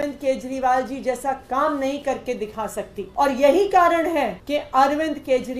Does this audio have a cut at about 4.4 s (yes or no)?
yes